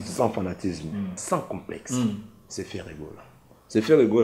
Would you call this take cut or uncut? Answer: cut